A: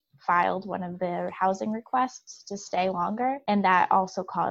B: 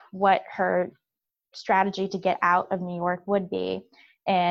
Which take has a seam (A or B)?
A